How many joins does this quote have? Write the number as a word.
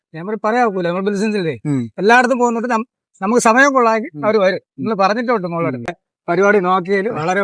one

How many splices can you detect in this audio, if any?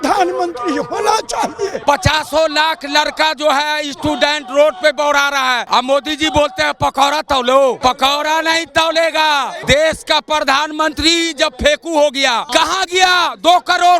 five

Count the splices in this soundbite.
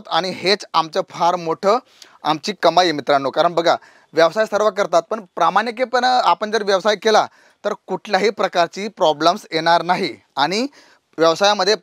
zero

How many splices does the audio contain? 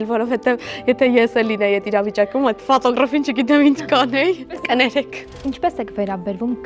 two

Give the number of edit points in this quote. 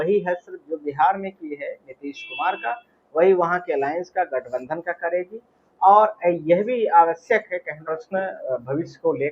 one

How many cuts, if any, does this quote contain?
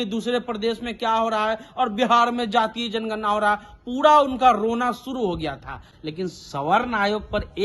one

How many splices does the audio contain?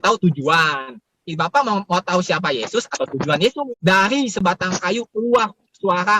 one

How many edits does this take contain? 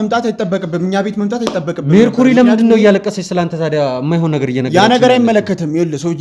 zero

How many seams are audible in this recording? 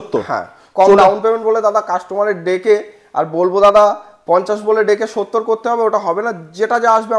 zero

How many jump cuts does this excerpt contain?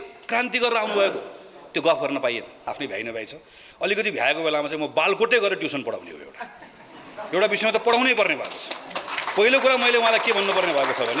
one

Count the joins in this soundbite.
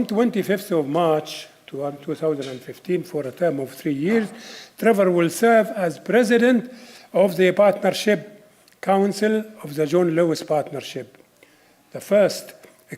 one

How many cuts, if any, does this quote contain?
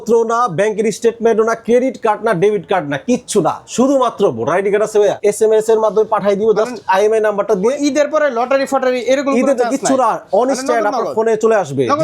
one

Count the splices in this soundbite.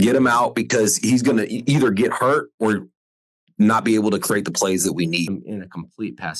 one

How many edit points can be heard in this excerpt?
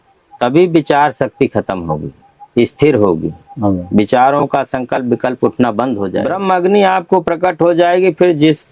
one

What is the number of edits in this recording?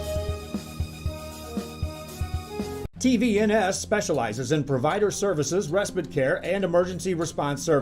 one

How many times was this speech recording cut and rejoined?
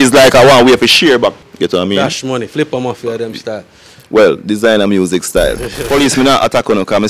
two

